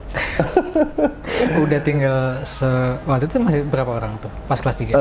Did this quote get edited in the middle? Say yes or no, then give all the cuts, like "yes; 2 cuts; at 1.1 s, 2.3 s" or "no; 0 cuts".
no; 0 cuts